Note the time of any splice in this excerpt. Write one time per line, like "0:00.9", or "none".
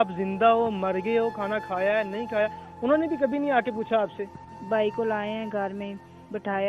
0:04.4